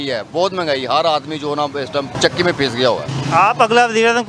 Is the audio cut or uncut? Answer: cut